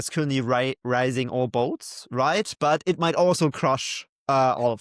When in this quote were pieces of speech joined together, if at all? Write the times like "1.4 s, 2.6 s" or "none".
none